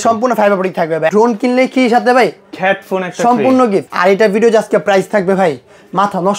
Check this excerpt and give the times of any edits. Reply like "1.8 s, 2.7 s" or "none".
1.1 s, 3.9 s